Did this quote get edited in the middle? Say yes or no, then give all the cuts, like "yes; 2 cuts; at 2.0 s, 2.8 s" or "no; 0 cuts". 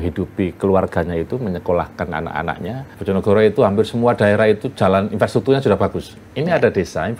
yes; 1 cut; at 2.9 s